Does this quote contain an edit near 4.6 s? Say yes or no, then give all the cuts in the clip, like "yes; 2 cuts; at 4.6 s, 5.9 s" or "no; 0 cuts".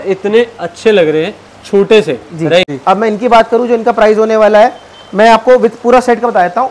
no; 1 cut; at 2.7 s